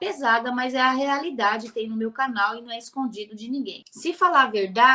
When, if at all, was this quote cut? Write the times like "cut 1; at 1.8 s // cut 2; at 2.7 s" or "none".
cut 1; at 3.8 s